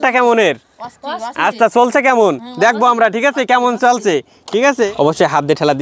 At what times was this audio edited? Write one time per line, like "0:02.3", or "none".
0:04.9